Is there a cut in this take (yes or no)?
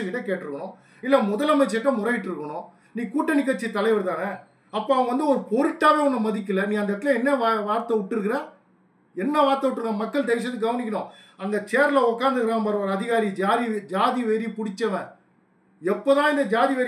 no